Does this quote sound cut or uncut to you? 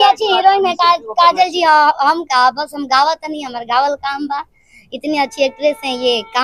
uncut